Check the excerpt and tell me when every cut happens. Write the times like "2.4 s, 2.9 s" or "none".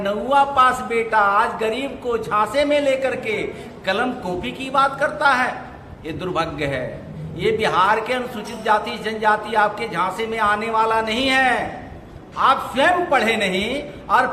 none